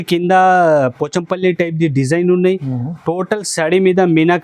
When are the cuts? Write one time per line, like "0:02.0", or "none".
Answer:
none